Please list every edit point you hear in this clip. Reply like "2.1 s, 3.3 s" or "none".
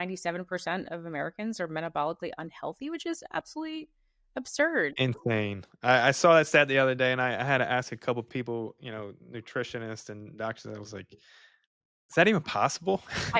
none